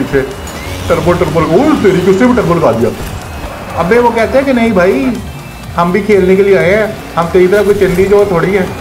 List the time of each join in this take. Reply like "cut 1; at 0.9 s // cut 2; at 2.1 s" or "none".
cut 1; at 7.0 s